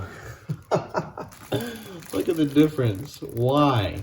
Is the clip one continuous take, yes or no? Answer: yes